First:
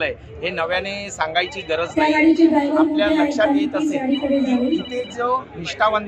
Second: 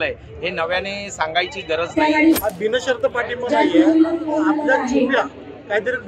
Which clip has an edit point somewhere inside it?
second; 1 cut; at 2.4 s

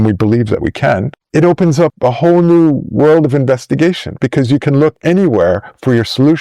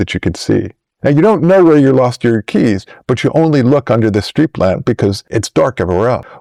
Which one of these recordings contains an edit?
first; 1 cut; at 4.1 s

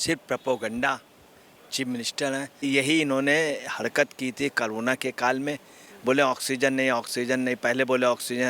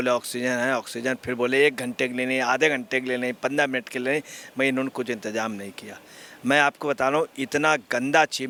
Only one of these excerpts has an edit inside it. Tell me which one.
first; 1 cut; at 2.6 s

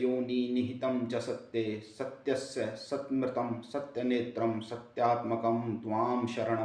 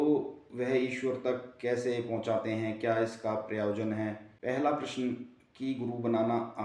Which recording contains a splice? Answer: second; 1 cut; at 4.3 s

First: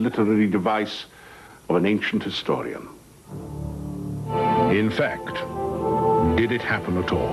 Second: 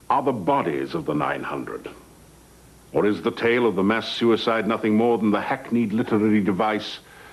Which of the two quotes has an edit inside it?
second; 1 cut; at 4.9 s

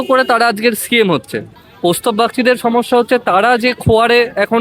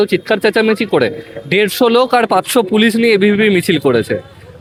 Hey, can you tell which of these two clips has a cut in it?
first; 1 cut; at 1.6 s

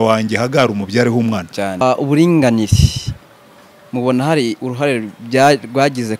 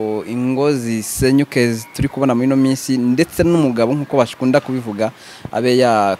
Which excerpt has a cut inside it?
first; 1 cut; at 1.8 s

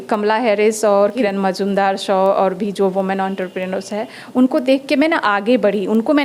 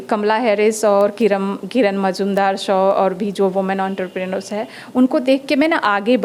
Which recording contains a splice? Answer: first; 1 cut; at 1.1 s

